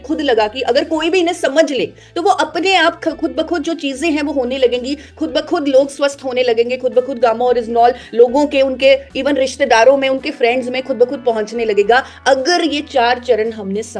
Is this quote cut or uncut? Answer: uncut